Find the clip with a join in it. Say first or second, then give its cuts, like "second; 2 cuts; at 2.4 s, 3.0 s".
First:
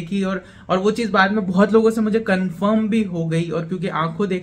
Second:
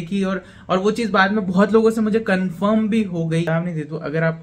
second; 1 cut; at 3.5 s